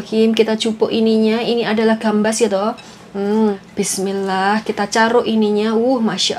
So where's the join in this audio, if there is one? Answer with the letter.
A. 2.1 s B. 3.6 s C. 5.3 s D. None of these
B